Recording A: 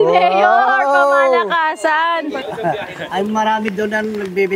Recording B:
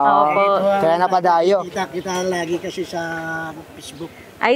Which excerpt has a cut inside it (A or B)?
A